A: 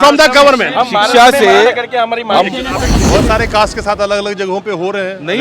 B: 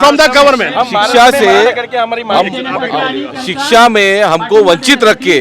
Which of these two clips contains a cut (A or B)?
A